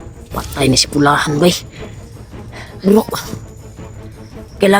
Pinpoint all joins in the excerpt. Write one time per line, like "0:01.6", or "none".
none